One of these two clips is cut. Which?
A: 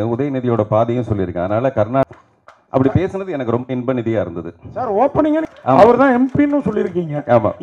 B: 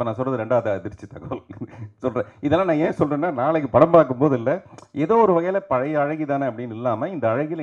A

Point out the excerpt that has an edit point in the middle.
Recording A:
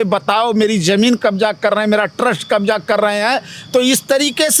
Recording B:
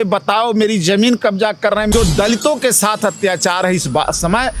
B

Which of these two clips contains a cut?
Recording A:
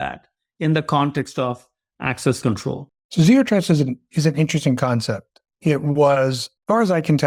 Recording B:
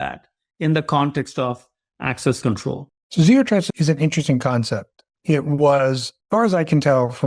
B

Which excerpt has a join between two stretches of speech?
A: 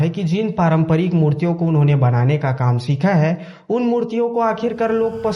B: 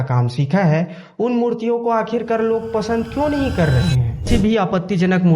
B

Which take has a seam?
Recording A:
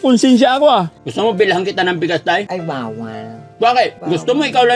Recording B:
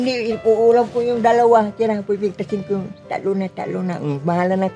A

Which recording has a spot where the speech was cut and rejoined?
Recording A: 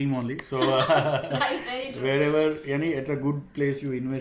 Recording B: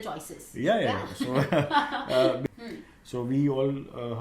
B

